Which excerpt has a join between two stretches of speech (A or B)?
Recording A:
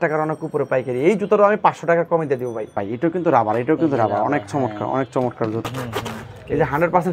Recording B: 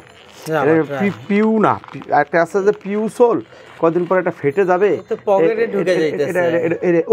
A